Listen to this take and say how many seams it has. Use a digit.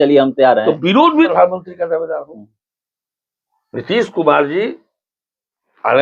1